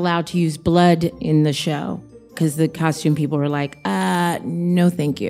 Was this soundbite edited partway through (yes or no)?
yes